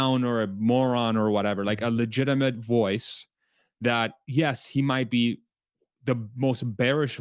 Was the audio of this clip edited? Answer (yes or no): no